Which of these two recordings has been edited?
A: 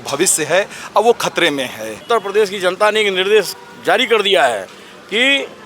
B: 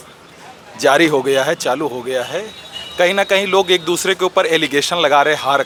A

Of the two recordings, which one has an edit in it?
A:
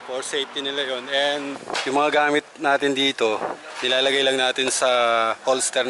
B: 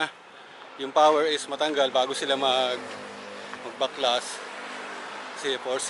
A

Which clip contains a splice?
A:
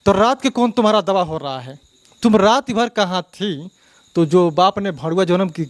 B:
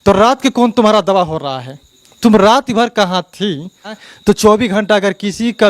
B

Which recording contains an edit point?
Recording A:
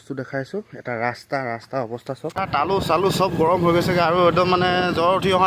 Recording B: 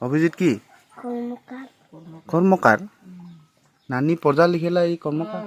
A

